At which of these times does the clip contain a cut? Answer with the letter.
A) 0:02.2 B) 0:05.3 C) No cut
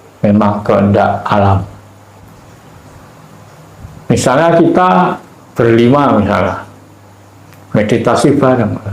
A